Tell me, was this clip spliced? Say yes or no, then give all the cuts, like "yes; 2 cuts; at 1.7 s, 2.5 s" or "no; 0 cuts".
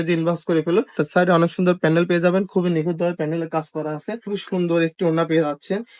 yes; 2 cuts; at 1.0 s, 4.3 s